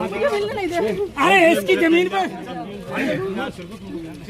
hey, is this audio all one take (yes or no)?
no